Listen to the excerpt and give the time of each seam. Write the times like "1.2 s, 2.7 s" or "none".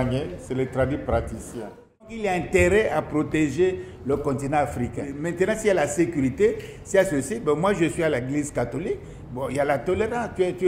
2.1 s, 5.2 s